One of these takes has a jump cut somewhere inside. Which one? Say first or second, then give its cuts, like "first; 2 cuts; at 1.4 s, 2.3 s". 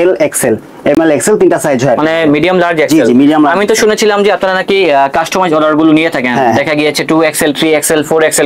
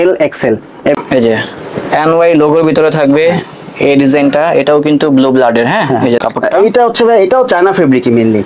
second; 2 cuts; at 0.9 s, 6.2 s